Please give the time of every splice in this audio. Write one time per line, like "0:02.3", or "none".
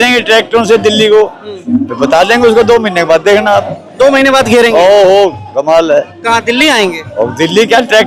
none